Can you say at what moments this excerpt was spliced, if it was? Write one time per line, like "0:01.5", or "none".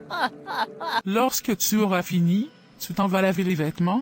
0:01.0